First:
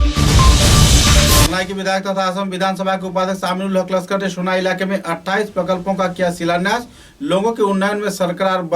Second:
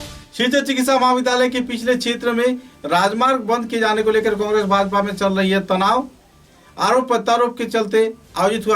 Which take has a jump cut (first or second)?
first